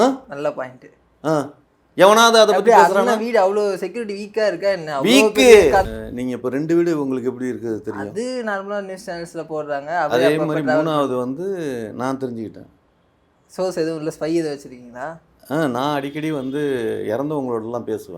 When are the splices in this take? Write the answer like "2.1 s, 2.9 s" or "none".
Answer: 5.9 s